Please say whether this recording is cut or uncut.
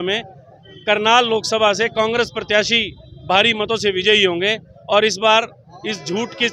uncut